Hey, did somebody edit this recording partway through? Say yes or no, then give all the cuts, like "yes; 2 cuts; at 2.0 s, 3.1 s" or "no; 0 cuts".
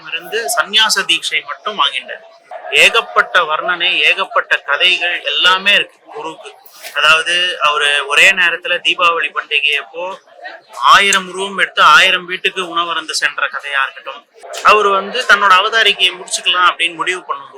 yes; 2 cuts; at 2.5 s, 14.5 s